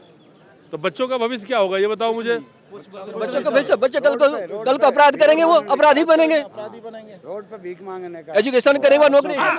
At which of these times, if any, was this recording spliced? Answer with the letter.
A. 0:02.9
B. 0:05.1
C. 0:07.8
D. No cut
D